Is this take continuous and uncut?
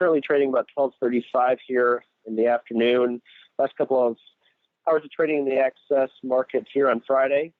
yes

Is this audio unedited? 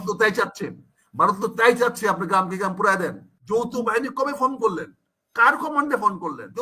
no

